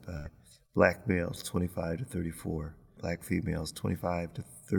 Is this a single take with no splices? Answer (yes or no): no